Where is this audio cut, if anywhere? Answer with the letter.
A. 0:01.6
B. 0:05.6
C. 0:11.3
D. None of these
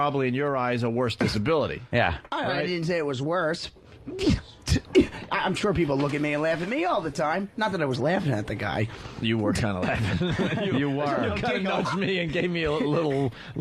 D